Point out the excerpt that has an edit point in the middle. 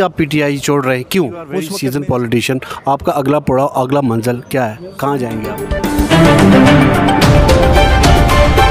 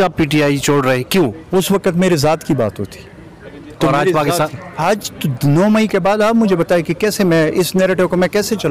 first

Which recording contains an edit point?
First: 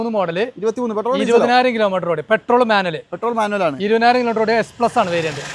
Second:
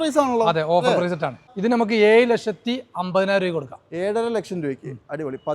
second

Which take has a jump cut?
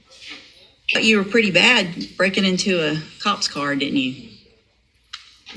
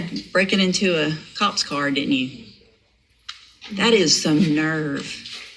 first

